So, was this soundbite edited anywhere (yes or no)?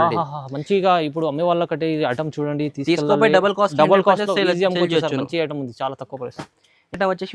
no